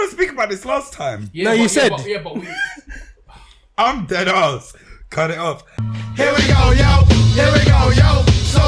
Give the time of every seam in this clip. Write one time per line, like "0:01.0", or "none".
0:05.7